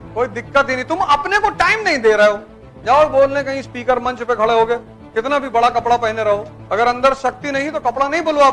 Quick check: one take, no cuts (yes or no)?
no